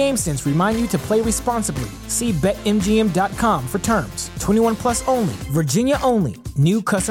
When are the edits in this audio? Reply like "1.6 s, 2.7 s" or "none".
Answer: none

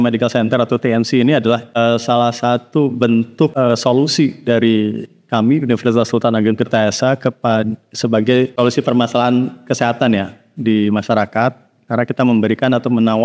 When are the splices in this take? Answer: 1.7 s, 3.5 s, 8.5 s

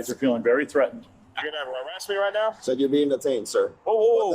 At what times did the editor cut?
1.0 s, 2.6 s

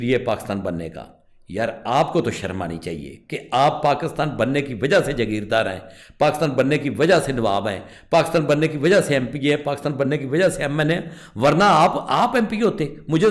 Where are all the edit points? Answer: none

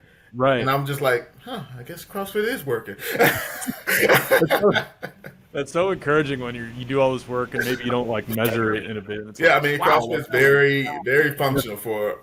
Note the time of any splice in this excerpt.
none

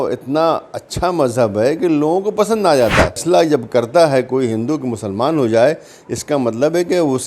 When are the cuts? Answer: 3.2 s

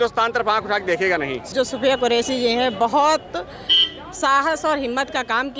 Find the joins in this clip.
1.4 s

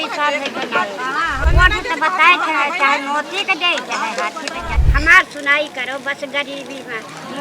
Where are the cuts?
1.5 s, 4.8 s

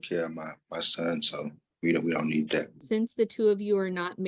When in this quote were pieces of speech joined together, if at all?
1.6 s, 2.8 s

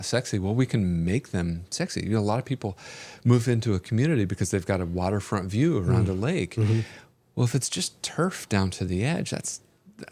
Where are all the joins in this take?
none

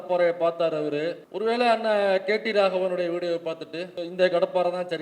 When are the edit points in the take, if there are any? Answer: 1.2 s, 4.0 s

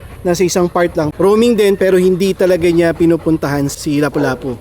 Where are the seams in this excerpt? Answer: 1.1 s, 3.7 s

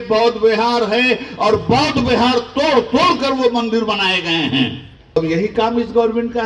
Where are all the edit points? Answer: 5.2 s

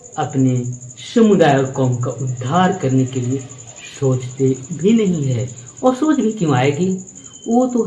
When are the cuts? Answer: none

